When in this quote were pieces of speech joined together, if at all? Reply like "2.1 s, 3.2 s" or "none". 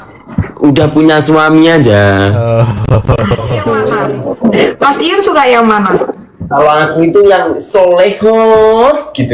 4.0 s